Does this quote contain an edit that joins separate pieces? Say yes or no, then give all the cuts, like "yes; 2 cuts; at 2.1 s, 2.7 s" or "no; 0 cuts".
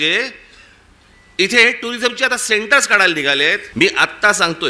yes; 1 cut; at 3.6 s